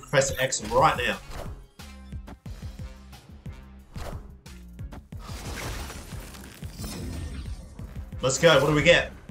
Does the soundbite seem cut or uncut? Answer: uncut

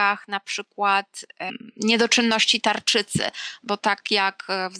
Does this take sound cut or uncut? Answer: cut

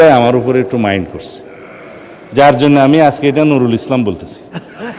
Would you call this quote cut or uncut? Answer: uncut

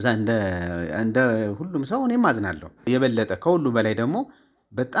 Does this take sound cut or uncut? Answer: cut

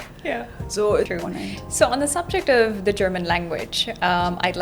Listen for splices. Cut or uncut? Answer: cut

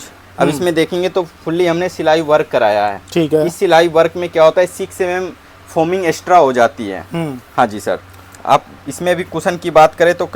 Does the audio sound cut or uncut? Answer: uncut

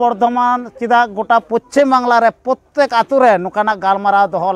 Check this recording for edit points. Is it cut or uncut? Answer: uncut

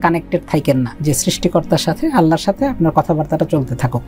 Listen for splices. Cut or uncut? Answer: cut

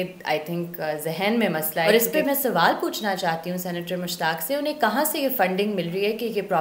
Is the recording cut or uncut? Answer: cut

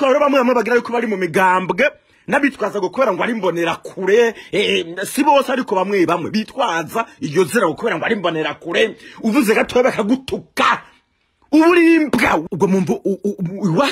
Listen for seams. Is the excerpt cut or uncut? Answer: cut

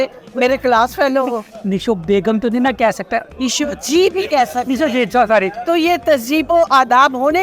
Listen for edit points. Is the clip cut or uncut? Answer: cut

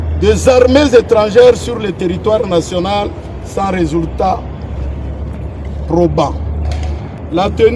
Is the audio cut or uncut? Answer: uncut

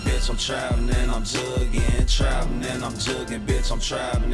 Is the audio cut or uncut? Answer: uncut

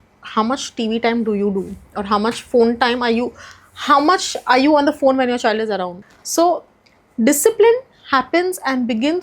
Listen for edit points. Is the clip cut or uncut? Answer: cut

